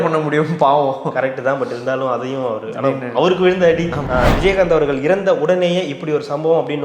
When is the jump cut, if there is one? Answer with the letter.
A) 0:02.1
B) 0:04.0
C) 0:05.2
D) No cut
B